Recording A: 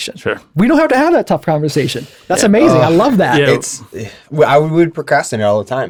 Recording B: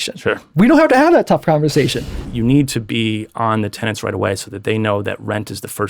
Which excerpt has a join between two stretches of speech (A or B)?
B